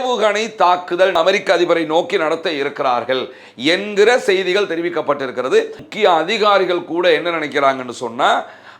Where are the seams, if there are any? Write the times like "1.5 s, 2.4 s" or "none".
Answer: 1.2 s, 5.8 s